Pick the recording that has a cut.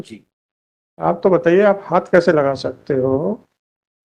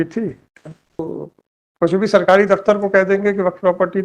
second; 1 cut; at 1.0 s

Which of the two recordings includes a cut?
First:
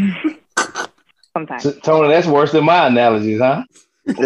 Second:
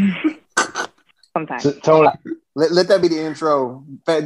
second; 1 cut; at 2.1 s

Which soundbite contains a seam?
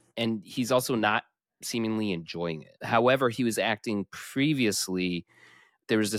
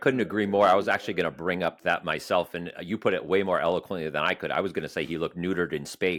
first; 1 cut; at 2.7 s

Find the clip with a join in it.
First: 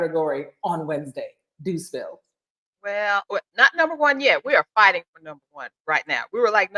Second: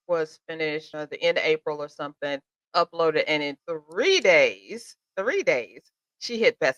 second; 1 cut; at 0.9 s

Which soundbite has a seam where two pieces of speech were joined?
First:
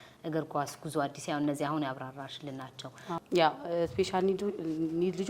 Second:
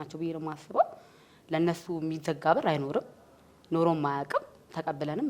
first; 1 cut; at 3.2 s

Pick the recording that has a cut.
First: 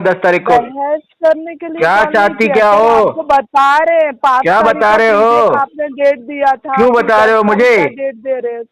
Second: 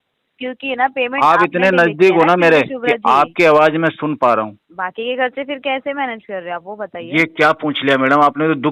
second; 1 cut; at 4.6 s

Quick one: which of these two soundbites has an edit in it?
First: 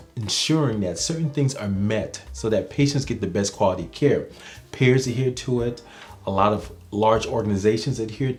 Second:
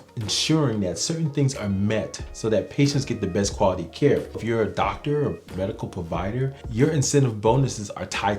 second; 2 cuts; at 4.4 s, 6.6 s

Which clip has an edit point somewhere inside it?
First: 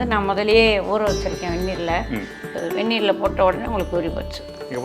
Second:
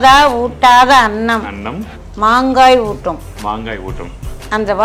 first; 1 cut; at 2.6 s

